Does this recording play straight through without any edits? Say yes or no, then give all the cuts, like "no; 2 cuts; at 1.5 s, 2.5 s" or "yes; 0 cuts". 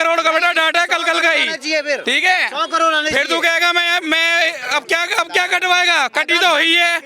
yes; 0 cuts